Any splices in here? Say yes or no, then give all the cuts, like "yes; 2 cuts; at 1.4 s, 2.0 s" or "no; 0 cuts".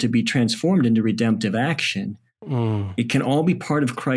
no; 0 cuts